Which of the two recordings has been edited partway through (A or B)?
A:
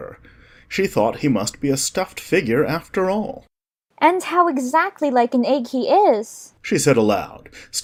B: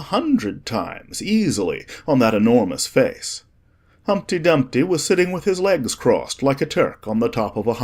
B